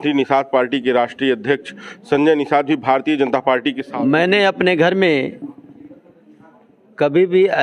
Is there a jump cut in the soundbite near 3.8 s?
yes; 1 cut; at 3.8 s

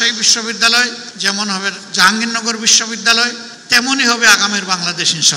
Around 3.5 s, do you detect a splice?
yes; 2 cuts; at 1.1 s, 3.5 s

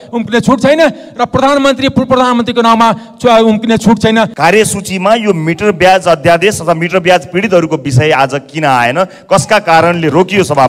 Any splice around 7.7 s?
no; 1 cut; at 4.3 s

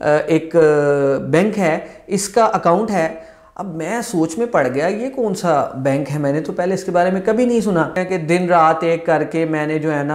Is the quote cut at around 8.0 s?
yes; 1 cut; at 8.0 s

